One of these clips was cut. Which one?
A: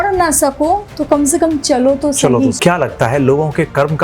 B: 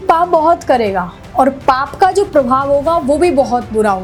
A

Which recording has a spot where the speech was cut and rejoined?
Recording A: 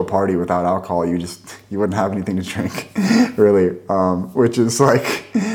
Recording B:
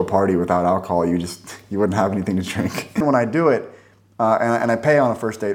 B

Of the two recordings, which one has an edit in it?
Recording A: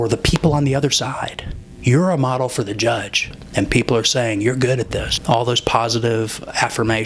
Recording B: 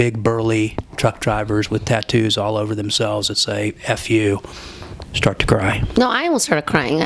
A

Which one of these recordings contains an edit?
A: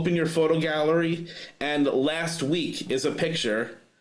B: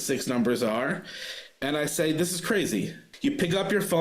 B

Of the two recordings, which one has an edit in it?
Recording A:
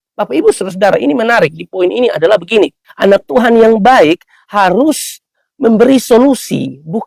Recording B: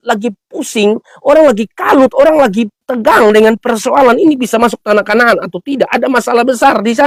A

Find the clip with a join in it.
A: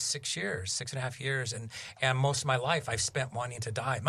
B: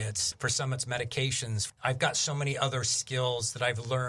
B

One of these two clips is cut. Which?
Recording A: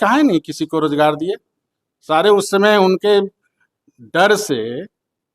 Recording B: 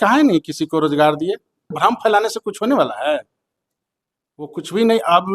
B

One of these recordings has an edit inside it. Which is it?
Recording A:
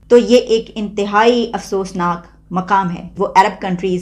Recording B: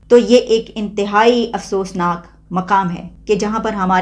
A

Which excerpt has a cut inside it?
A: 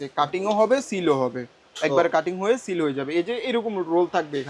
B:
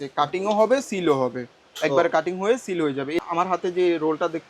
B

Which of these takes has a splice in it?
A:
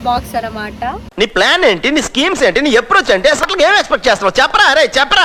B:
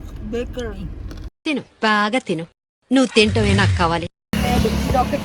B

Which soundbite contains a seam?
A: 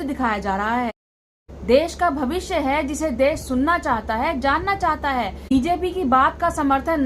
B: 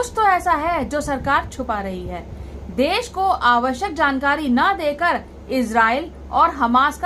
A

